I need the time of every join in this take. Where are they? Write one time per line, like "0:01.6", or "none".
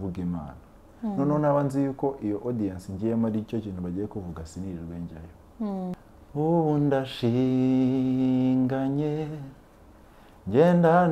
0:05.9